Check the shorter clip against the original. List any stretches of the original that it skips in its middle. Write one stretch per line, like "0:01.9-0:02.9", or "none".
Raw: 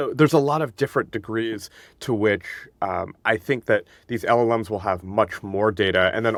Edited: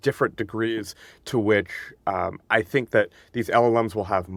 none